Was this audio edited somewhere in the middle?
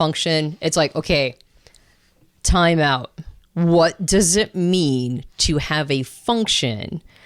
no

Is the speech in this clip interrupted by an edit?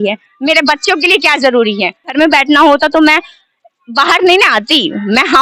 yes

